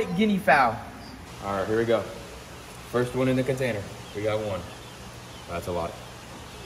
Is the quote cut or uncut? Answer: cut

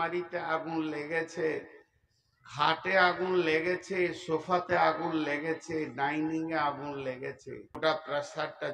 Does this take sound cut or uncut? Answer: cut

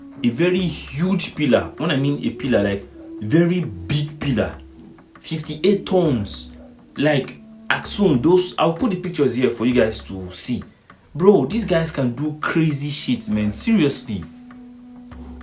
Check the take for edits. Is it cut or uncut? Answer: uncut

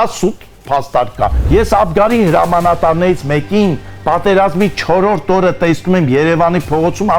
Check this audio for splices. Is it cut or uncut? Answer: cut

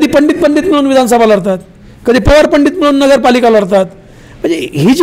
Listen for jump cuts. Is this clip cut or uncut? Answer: uncut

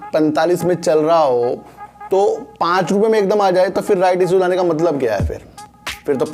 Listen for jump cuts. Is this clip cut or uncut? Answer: uncut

